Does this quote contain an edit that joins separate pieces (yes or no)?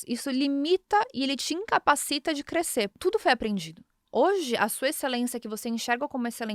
yes